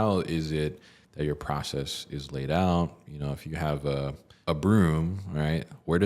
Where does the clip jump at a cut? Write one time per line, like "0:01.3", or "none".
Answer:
0:04.3